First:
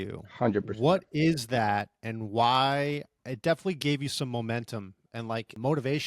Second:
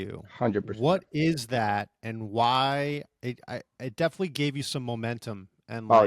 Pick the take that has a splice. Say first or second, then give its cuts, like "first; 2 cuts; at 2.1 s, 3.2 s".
first; 2 cuts; at 3.1 s, 5.2 s